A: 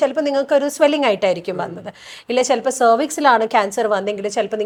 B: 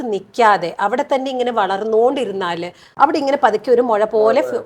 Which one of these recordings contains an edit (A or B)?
B